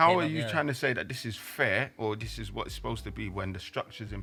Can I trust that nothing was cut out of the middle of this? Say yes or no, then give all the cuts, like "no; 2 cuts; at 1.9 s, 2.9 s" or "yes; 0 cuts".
yes; 0 cuts